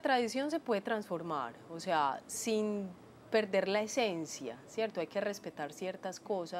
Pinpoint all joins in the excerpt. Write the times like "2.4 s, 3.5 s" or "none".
none